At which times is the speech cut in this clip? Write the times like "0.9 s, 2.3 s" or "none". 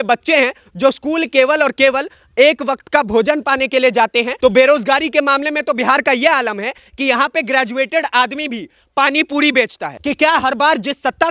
4.3 s, 9.9 s

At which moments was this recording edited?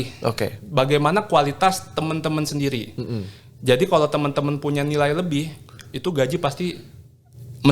none

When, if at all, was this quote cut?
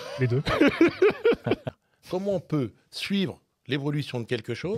1.6 s

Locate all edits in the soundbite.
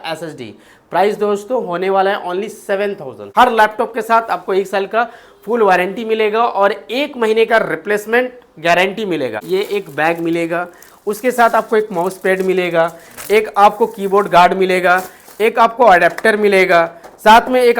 3.2 s, 9.4 s

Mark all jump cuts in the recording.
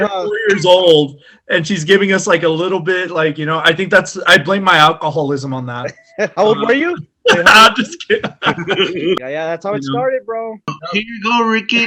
9.2 s, 10.8 s

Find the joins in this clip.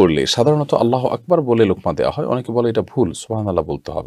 none

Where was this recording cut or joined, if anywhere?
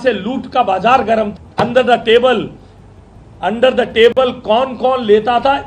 1.4 s

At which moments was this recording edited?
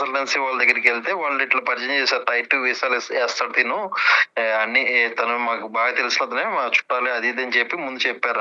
none

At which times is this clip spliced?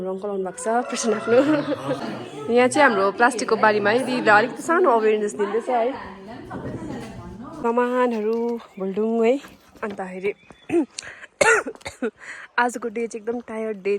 2.1 s, 7.6 s

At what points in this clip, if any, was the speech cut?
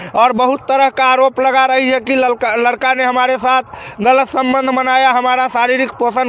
none

